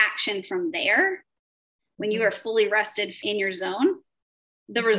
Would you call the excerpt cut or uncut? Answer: cut